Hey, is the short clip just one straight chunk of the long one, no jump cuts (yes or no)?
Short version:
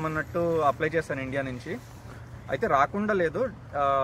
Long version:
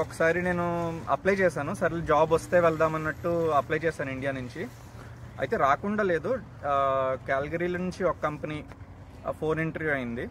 yes